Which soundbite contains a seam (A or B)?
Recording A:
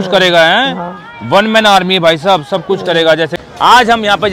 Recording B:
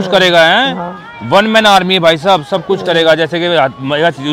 A